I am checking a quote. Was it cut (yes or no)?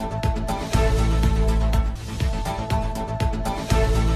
no